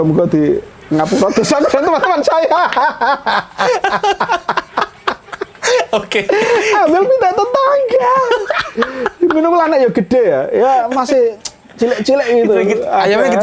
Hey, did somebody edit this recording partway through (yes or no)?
no